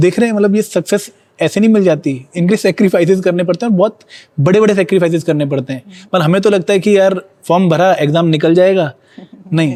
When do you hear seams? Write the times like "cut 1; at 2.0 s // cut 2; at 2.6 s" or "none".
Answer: none